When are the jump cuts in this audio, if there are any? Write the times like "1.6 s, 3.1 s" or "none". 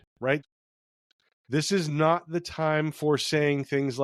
none